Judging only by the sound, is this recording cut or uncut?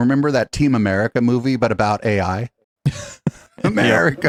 uncut